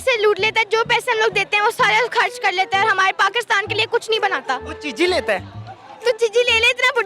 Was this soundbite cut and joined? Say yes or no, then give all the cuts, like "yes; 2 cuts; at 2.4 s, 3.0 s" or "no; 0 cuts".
no; 0 cuts